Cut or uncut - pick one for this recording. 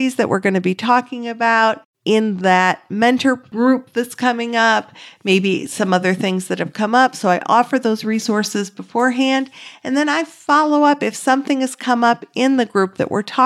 cut